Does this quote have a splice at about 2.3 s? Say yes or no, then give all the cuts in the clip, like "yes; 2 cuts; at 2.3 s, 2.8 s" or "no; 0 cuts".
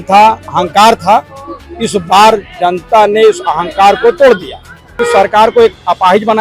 no; 1 cut; at 5.0 s